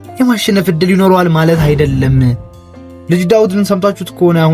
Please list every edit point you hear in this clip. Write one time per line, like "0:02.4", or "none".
0:02.5